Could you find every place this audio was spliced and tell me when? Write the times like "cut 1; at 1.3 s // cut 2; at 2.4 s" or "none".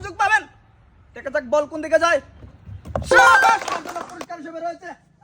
cut 1; at 3.7 s